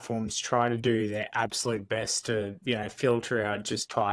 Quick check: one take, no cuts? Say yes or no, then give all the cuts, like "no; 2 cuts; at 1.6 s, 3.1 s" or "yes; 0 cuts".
yes; 0 cuts